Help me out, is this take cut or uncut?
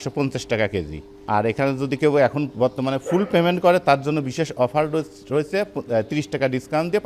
uncut